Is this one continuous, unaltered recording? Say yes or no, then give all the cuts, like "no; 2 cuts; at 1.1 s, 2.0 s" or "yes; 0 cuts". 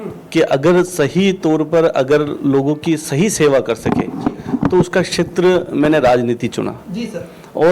yes; 0 cuts